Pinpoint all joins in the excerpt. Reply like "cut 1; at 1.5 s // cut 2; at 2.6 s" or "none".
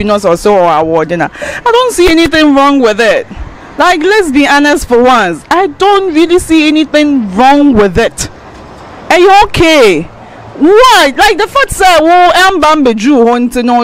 none